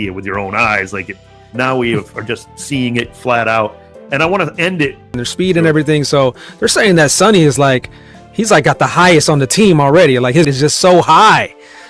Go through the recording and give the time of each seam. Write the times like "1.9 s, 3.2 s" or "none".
5.2 s, 10.5 s